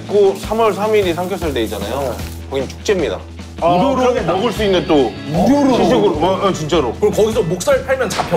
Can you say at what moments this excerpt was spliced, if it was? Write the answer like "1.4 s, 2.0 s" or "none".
none